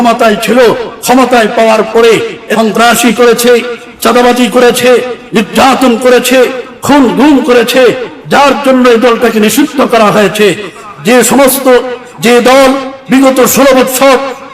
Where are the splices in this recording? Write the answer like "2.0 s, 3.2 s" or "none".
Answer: 2.4 s